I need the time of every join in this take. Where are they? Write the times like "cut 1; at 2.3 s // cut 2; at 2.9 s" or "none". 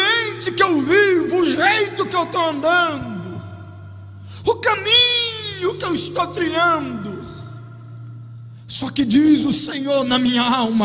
none